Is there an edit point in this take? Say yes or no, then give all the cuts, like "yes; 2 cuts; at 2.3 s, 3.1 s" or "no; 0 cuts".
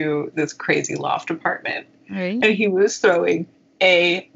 no; 0 cuts